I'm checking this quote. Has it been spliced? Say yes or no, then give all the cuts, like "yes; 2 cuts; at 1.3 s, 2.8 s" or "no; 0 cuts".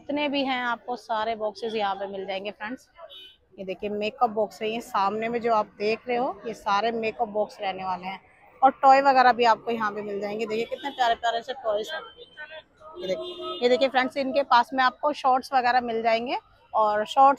no; 0 cuts